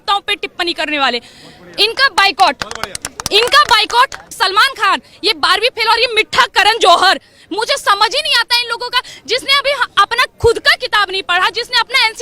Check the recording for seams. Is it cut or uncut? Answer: cut